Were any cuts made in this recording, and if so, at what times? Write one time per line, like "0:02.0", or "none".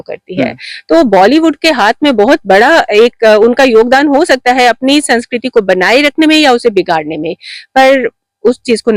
none